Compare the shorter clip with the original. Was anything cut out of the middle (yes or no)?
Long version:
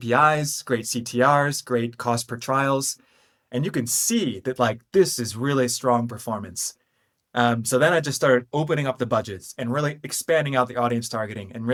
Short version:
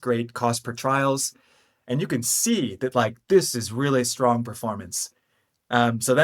no